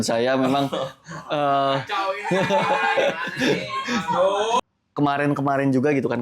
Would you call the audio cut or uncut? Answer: cut